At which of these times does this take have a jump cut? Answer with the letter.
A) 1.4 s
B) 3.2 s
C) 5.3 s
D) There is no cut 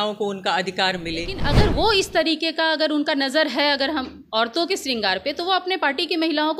A